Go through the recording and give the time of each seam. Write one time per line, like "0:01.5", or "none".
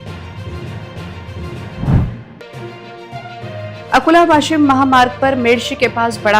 0:02.3